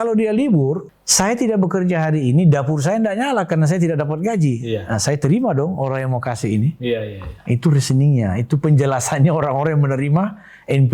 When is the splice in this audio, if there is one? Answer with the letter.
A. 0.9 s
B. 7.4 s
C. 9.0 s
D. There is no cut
A